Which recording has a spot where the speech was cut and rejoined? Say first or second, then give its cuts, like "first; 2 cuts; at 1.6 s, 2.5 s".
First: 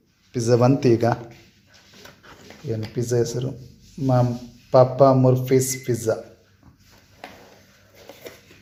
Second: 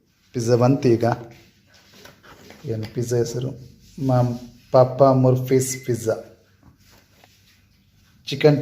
second; 1 cut; at 7.0 s